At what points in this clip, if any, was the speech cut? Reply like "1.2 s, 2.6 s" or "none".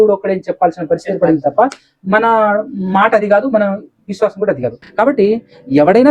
4.8 s